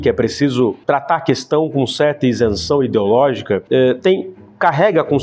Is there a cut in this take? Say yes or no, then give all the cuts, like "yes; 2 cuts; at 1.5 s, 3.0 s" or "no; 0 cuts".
no; 0 cuts